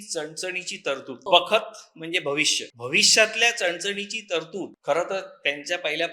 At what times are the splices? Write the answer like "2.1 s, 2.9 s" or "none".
1.3 s, 2.7 s, 4.8 s